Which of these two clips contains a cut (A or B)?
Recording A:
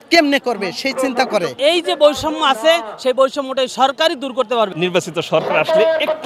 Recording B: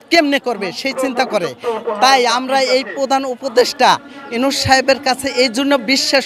A